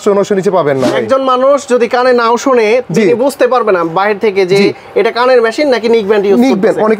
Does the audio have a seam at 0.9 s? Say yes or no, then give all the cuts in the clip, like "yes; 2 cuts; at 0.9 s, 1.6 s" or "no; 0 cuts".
yes; 1 cut; at 0.9 s